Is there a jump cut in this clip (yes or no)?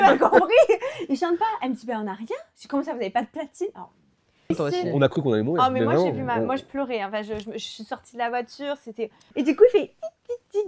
yes